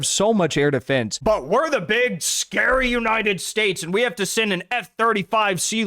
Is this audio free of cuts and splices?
no; 1 cut; at 1.1 s

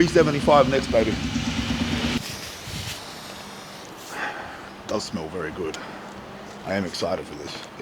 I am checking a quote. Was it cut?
yes; 1 cut; at 2.2 s

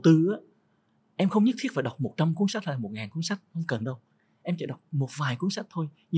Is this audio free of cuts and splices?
yes; 0 cuts

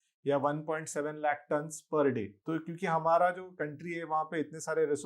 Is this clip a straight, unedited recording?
no; 1 cut; at 2.3 s

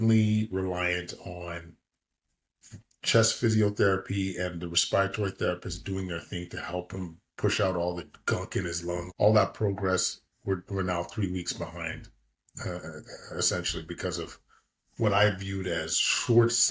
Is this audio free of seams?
no; 1 cut; at 9.1 s

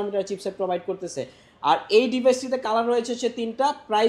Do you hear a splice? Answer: no; 0 cuts

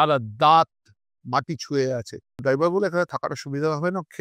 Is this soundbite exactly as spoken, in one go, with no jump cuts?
no; 1 cut; at 2.4 s

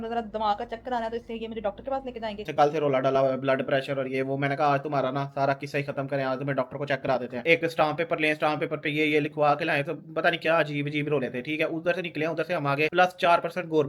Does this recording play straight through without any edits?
no; 3 cuts; at 2.5 s, 7.4 s, 12.9 s

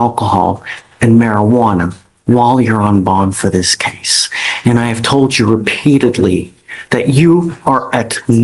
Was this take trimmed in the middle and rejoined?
no; 0 cuts

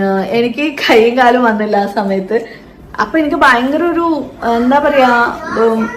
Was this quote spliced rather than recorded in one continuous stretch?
yes; 1 cut; at 2.6 s

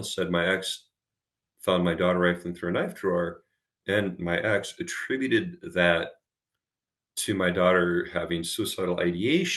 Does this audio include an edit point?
yes; 1 cut; at 3.8 s

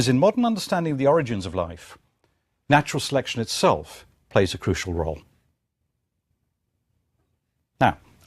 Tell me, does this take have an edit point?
yes; 1 cut; at 3.4 s

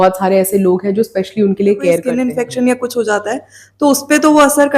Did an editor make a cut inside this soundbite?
yes; 1 cut; at 2.1 s

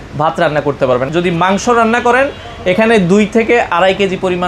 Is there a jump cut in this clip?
yes; 1 cut; at 1.1 s

